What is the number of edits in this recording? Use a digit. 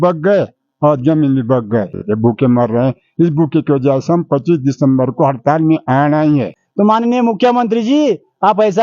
2